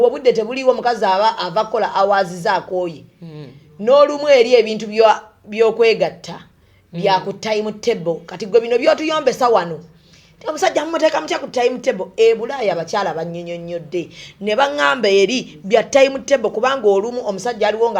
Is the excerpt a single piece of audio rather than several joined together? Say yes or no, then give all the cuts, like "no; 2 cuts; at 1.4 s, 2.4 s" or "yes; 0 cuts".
yes; 0 cuts